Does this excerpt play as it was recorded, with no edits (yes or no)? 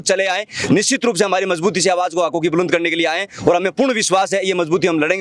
yes